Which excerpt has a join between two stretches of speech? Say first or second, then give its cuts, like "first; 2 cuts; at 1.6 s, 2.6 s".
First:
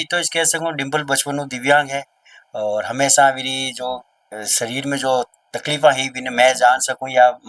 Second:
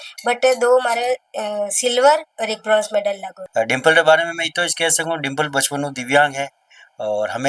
second; 1 cut; at 3.5 s